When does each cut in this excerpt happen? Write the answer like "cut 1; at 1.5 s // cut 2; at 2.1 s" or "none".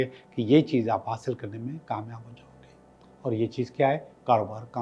none